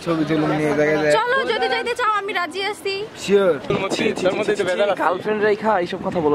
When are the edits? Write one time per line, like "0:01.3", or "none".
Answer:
0:03.7

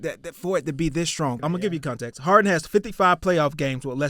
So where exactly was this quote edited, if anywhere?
0:01.4

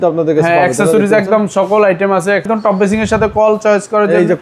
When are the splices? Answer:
0:02.5

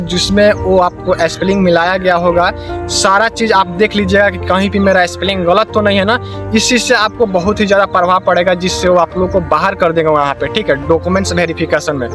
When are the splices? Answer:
none

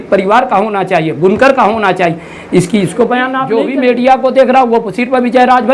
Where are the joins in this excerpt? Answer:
0:03.4

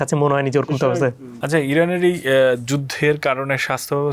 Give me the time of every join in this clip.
0:01.3

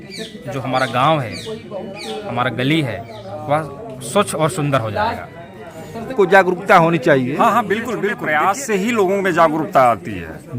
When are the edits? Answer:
0:06.1
0:08.2

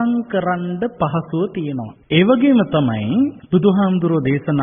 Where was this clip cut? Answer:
0:01.9
0:03.4

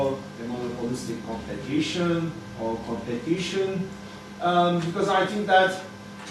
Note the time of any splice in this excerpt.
0:01.5

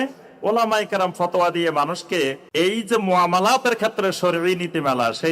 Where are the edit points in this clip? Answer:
0:02.4

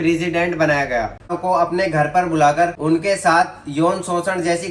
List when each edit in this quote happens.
0:01.4
0:02.8

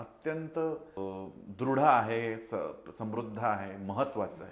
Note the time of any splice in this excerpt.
0:01.0

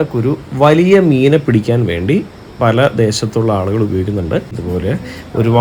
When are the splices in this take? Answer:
0:04.6

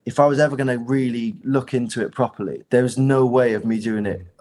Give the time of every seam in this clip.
0:01.4
0:02.6

